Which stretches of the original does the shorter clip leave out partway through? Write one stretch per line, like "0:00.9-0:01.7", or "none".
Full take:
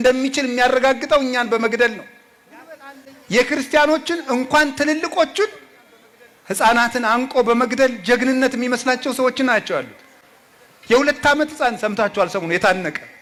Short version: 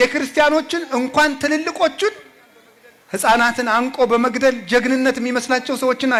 none